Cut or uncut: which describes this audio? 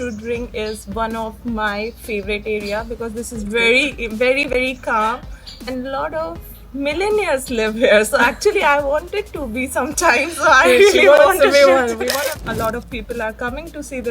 cut